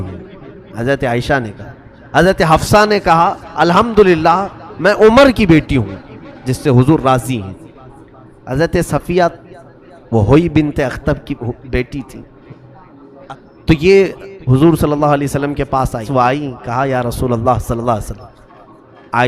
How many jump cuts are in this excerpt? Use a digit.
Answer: 2